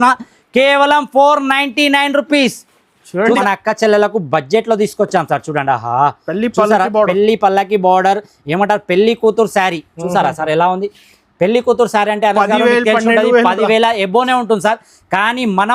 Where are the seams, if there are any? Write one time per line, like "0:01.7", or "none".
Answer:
0:03.4